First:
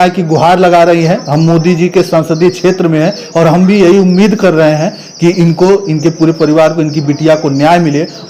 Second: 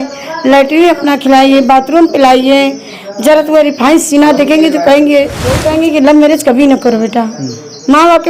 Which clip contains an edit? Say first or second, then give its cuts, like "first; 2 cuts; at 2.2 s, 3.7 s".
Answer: second; 1 cut; at 5.5 s